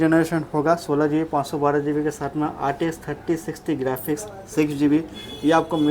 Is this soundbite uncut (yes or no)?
yes